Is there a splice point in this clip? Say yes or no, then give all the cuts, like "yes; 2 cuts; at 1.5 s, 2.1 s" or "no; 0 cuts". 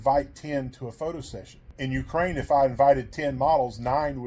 no; 0 cuts